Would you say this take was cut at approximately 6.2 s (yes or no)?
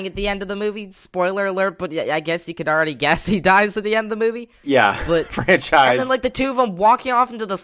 no